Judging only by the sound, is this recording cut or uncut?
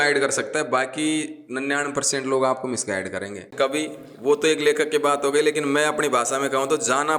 cut